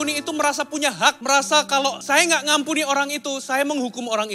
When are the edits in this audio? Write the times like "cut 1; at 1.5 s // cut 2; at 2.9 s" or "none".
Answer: cut 1; at 1.2 s // cut 2; at 2.0 s